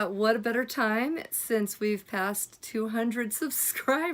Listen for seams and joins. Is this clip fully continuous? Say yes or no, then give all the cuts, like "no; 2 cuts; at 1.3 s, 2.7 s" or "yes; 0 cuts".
yes; 0 cuts